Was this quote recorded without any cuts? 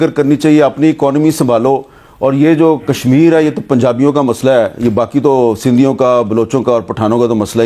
yes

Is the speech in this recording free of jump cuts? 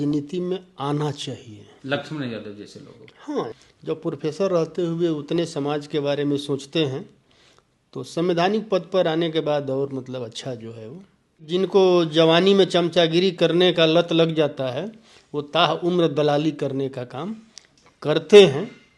no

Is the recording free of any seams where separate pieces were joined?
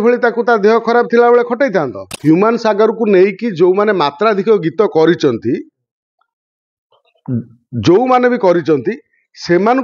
no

